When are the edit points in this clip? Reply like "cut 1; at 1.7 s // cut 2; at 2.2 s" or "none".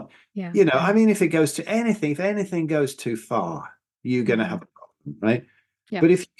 none